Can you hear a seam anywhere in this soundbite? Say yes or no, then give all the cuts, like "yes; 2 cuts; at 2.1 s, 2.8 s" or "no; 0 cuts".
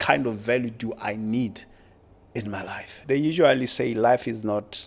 yes; 1 cut; at 2.9 s